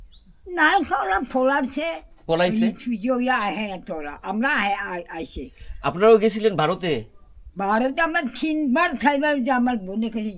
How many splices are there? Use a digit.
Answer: 0